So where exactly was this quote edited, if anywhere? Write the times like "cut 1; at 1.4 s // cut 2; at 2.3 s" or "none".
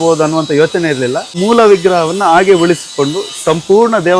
cut 1; at 1.3 s